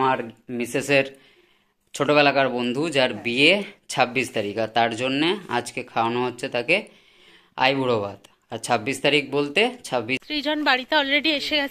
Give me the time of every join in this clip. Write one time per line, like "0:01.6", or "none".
0:10.1